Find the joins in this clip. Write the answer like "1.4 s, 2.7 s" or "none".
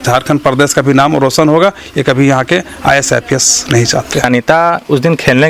4.3 s